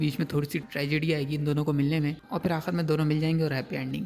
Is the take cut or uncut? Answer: uncut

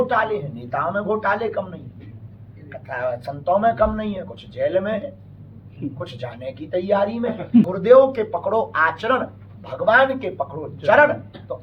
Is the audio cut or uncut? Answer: cut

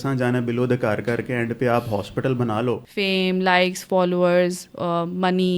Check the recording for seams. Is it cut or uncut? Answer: cut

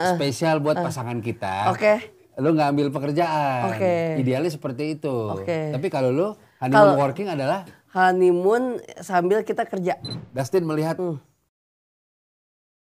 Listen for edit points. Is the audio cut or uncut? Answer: cut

